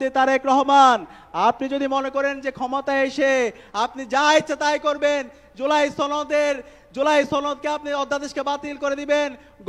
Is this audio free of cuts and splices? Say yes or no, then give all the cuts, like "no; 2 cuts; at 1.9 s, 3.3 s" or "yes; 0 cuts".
yes; 0 cuts